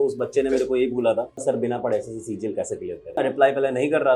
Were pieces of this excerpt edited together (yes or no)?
yes